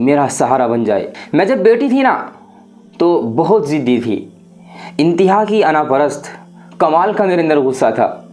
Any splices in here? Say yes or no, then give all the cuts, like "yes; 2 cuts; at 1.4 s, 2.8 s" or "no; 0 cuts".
yes; 1 cut; at 1.1 s